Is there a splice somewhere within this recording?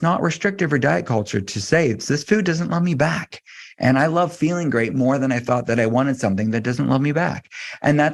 no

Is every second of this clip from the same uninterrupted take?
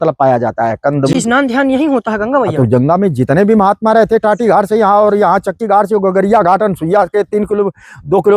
no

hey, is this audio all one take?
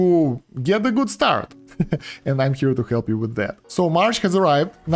no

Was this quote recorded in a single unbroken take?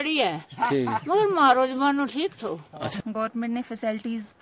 no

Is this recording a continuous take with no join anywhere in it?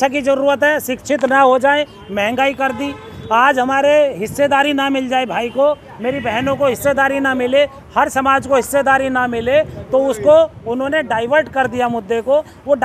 yes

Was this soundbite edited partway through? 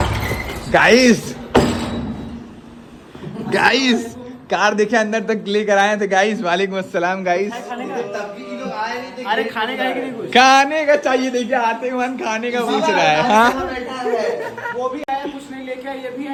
no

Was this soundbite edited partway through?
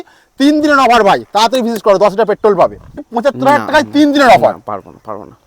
yes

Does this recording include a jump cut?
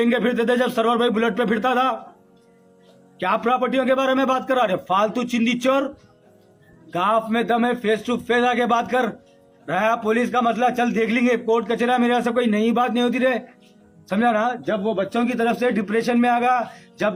no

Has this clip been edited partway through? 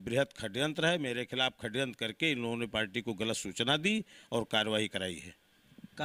no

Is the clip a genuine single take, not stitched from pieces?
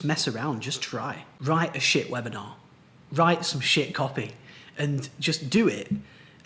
no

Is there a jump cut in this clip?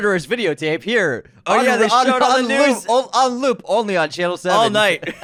no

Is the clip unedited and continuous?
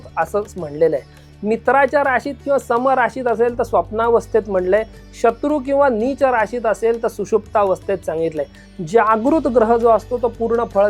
yes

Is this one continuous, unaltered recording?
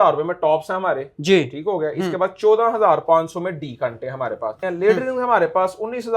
no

